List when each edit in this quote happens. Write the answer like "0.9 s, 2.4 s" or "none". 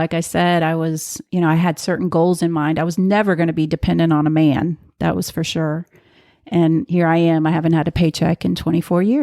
none